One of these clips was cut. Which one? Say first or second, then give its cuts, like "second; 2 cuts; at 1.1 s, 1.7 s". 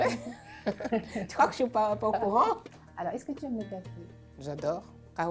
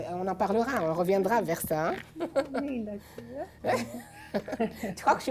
first; 1 cut; at 2.6 s